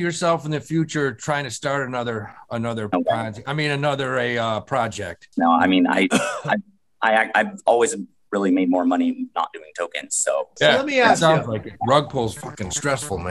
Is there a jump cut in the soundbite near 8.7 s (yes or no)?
no